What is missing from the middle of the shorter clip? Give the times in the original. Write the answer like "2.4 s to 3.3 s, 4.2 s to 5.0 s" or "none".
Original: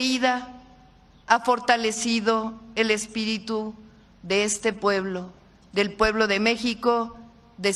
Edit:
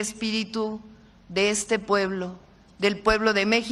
none